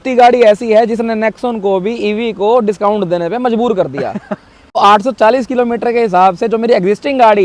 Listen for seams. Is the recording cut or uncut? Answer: cut